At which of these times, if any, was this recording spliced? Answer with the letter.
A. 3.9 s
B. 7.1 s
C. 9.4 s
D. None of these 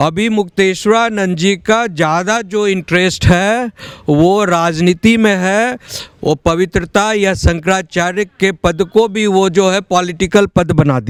D